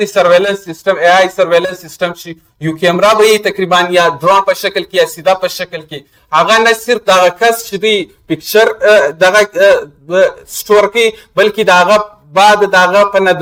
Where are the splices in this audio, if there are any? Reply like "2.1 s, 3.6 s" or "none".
none